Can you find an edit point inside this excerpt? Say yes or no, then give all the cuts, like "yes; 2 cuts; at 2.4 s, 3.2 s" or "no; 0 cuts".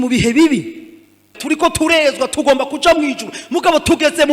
yes; 1 cut; at 1.3 s